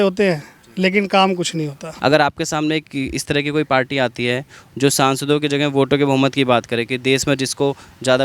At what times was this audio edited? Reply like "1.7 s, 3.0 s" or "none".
1.8 s